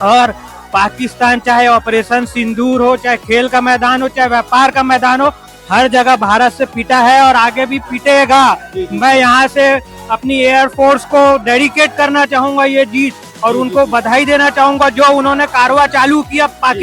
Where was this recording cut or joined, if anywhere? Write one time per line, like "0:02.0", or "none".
none